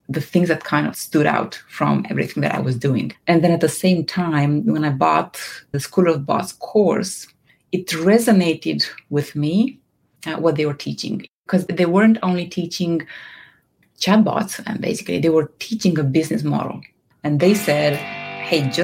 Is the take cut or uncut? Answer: uncut